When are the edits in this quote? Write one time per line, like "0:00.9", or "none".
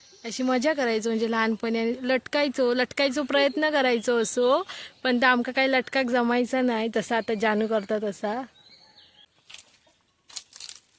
0:09.3